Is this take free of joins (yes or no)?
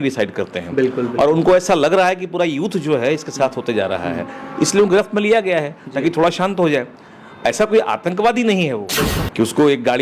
no